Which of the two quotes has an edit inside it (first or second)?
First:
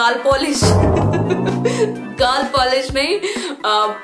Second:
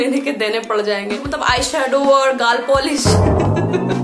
second